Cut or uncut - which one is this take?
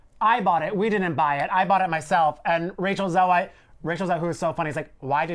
uncut